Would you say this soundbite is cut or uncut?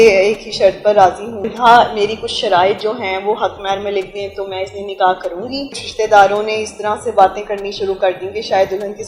cut